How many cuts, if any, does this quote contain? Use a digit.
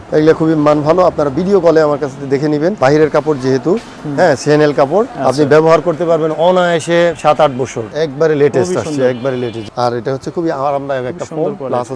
4